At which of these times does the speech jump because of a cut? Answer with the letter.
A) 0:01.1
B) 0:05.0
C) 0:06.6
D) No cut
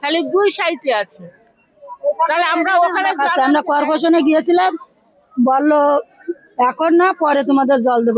D